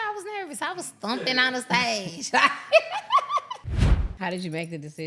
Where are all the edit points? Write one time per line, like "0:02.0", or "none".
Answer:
0:04.0